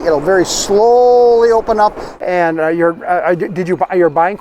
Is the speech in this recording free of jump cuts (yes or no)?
no